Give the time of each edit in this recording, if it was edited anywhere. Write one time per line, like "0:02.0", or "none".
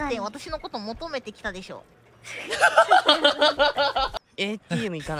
0:04.1